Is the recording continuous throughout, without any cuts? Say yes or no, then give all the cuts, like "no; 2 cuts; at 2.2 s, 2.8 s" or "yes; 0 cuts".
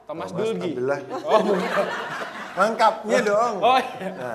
yes; 0 cuts